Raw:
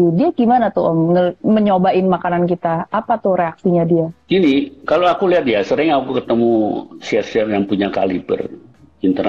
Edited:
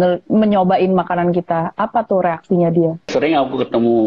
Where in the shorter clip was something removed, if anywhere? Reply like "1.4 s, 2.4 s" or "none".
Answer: 3.1 s